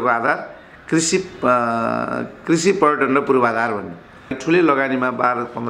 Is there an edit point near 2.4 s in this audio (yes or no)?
no